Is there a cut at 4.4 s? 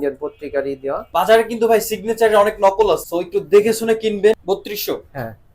yes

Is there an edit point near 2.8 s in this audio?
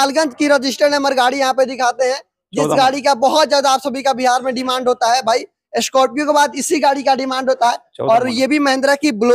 no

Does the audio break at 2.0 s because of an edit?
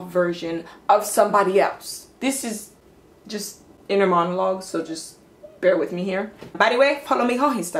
no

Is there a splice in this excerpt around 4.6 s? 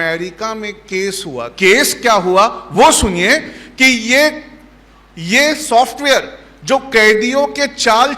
no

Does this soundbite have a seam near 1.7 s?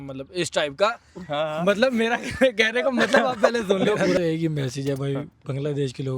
no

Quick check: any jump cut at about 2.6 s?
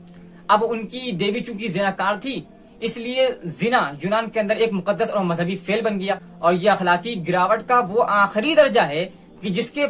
no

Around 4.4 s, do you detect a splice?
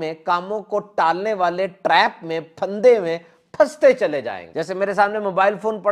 yes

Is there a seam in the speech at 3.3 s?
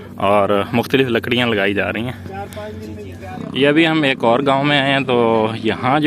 yes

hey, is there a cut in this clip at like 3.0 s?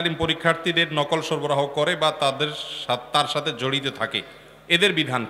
no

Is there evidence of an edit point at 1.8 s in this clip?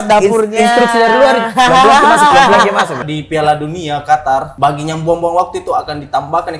no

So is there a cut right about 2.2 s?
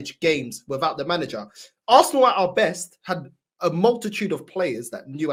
no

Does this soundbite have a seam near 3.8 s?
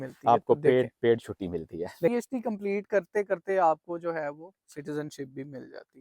no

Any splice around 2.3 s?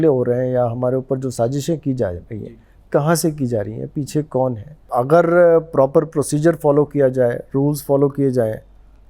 no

